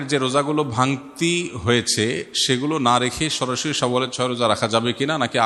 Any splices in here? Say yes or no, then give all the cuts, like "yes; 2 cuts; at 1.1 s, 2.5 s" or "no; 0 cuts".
no; 0 cuts